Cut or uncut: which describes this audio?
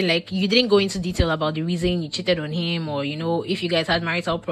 uncut